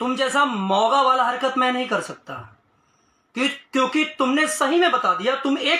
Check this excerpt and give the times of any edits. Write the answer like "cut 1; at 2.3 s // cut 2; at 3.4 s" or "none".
none